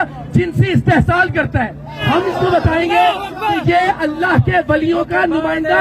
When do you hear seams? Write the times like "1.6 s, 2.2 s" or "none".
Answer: 2.0 s